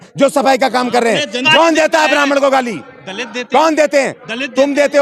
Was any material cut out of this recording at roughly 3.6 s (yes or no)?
no